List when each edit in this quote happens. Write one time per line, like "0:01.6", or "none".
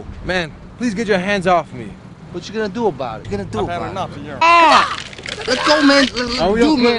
none